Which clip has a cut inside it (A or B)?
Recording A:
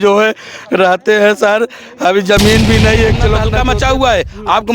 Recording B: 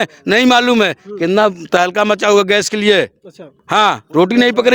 A